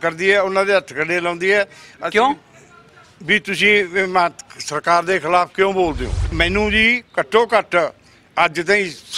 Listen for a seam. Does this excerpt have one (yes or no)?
yes